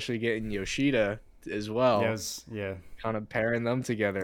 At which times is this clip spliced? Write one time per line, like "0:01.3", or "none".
none